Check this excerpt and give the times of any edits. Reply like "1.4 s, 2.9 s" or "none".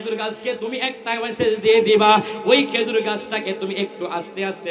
none